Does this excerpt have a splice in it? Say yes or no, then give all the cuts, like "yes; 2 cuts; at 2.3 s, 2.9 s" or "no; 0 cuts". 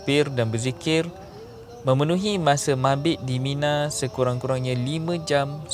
no; 0 cuts